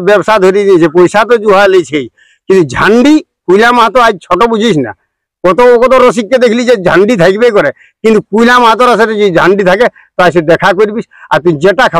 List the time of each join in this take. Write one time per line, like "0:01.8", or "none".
none